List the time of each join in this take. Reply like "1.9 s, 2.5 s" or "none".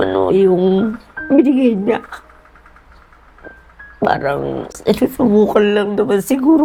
none